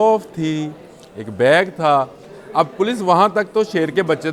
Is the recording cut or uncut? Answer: uncut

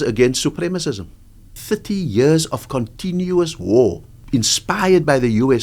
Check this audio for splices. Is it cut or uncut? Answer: cut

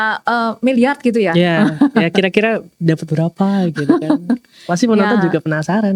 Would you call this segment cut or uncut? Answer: uncut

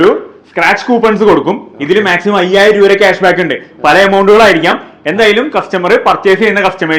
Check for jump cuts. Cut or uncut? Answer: uncut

